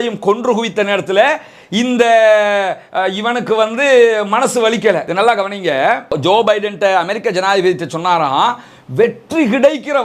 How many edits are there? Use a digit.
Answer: 1